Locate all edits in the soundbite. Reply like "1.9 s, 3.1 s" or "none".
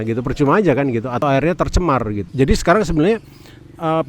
1.2 s, 2.2 s